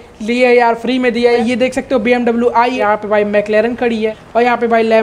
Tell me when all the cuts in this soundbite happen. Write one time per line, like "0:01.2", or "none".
0:01.4
0:02.8
0:04.2

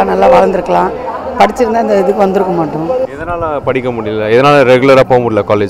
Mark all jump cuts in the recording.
0:03.1

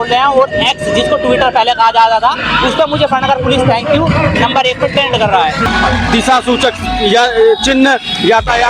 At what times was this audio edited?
0:05.6

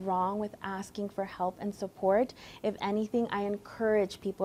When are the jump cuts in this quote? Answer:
none

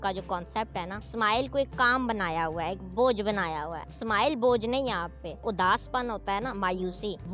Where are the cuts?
0:01.0
0:03.9
0:05.4

